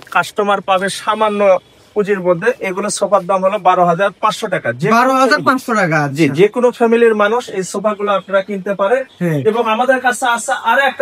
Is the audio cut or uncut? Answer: uncut